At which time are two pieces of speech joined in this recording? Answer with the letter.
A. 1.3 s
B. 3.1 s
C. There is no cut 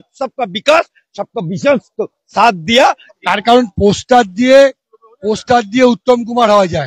B